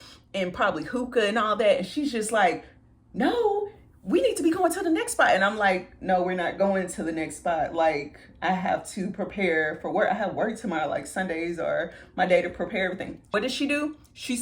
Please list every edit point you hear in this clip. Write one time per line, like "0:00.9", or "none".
0:13.2